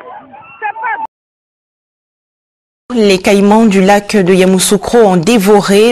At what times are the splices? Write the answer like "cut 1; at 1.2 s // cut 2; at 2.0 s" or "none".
none

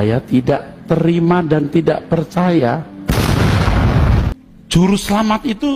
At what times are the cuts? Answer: cut 1; at 4.3 s

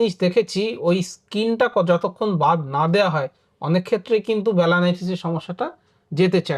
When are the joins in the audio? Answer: none

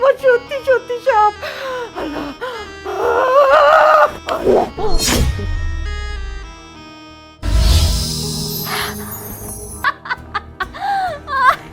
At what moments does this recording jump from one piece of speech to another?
cut 1; at 9.9 s

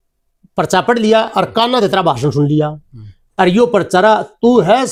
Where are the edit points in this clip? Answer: none

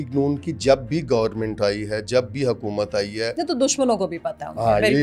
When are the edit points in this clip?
none

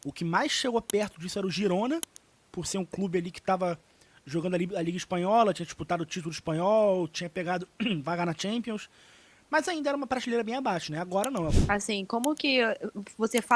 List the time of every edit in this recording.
cut 1; at 11.6 s

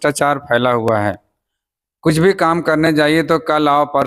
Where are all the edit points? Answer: none

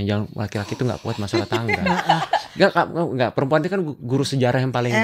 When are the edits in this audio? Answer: cut 1; at 2.5 s

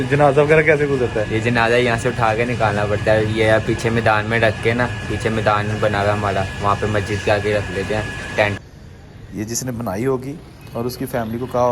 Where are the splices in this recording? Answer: cut 1; at 8.5 s

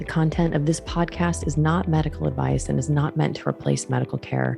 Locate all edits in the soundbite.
none

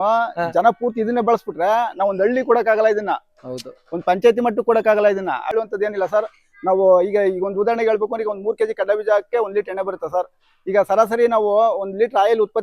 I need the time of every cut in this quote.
cut 1; at 5.5 s

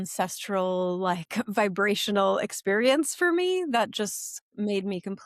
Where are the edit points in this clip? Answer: none

